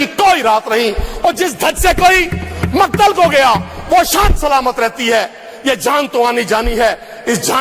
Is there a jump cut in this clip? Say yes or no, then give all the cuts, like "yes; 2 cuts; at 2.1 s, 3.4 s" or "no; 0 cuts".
no; 0 cuts